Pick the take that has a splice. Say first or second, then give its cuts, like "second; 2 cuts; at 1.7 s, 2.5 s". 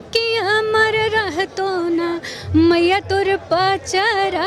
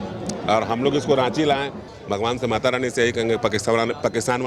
second; 1 cut; at 1.8 s